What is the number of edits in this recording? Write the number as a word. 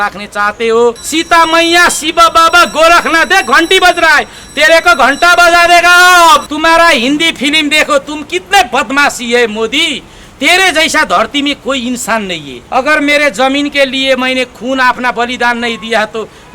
three